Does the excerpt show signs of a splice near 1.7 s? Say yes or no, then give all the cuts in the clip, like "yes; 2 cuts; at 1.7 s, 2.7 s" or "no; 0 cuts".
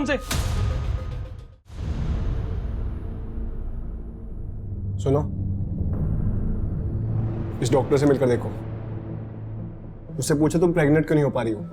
yes; 1 cut; at 1.7 s